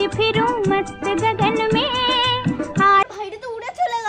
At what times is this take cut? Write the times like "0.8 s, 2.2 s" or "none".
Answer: none